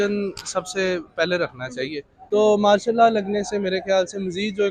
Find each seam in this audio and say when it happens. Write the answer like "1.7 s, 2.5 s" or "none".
2.2 s